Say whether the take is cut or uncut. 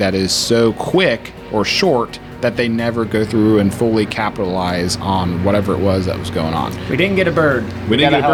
uncut